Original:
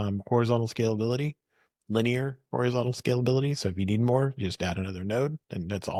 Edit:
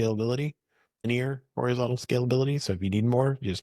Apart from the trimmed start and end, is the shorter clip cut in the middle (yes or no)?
yes